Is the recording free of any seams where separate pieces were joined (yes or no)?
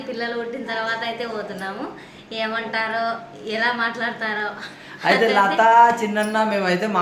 yes